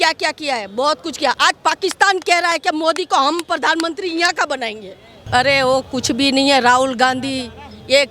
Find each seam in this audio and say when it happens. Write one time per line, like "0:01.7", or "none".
0:05.1